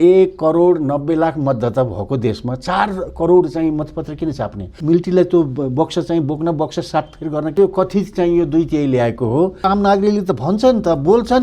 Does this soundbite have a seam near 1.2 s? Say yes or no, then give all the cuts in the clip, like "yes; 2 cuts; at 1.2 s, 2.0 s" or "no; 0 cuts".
no; 3 cuts; at 4.7 s, 7.6 s, 9.6 s